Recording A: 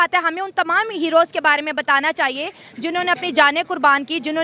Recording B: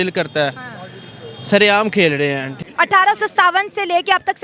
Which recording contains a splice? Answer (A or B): B